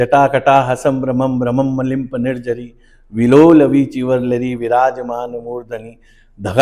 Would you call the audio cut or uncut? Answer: uncut